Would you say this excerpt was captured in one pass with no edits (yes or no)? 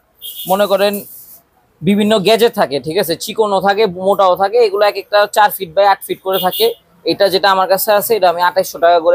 yes